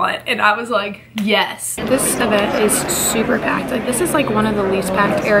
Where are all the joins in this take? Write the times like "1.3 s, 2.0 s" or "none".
1.8 s